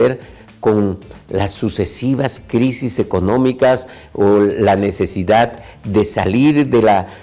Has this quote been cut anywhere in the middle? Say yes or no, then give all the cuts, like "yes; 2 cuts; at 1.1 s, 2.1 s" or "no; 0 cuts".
no; 0 cuts